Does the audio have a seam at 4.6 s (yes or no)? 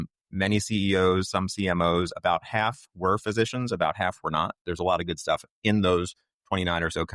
yes